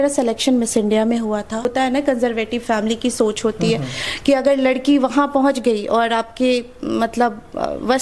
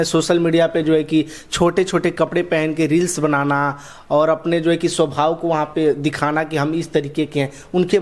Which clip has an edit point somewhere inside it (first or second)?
first